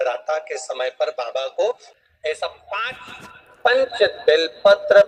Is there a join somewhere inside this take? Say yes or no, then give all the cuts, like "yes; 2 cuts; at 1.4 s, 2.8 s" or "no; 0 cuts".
yes; 1 cut; at 2.0 s